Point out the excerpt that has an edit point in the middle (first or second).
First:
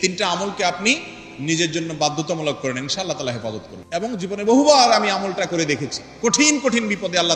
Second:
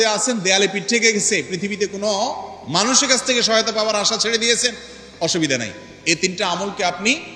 first